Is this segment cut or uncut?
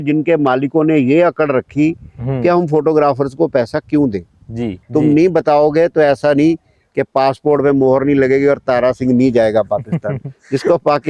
cut